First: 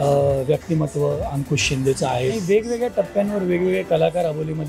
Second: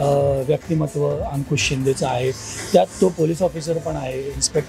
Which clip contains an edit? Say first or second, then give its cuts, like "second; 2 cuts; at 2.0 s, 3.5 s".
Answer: first; 1 cut; at 2.4 s